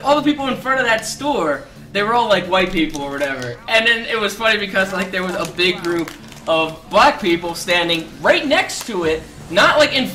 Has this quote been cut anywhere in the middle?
yes; 1 cut; at 5.8 s

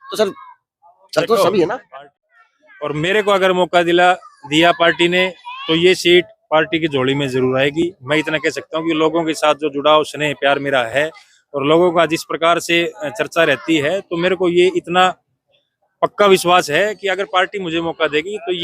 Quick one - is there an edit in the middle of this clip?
yes; 1 cut; at 1.9 s

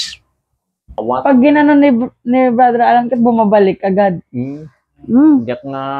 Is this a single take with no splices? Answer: no; 1 cut; at 1.0 s

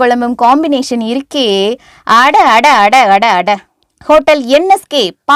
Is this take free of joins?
yes; 0 cuts

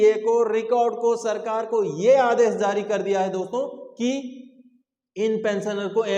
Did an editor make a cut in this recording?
no; 0 cuts

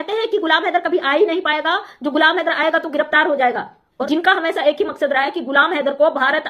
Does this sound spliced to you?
yes; 1 cut; at 3.9 s

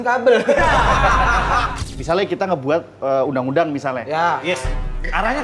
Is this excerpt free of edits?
no; 1 cut; at 1.7 s

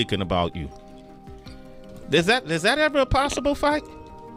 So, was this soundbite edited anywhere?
no; 0 cuts

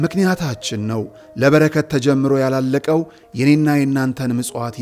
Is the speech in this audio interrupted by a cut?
no; 0 cuts

